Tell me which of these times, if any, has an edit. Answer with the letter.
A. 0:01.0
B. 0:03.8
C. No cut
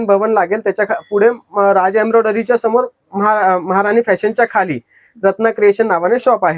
C